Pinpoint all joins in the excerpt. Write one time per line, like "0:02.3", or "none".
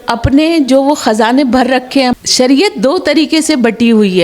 0:02.1